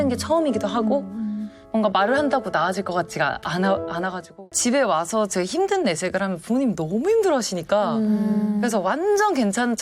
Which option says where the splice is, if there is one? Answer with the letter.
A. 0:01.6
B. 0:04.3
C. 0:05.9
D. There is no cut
B